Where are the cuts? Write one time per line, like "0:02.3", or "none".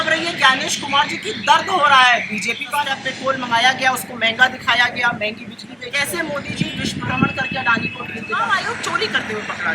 0:03.0
0:05.9
0:08.3

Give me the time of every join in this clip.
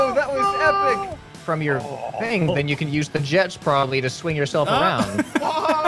0:01.1

